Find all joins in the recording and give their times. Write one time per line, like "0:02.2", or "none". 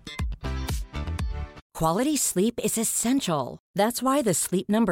0:01.6